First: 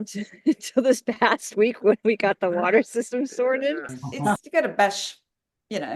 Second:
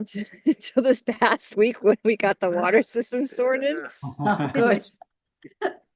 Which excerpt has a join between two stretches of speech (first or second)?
first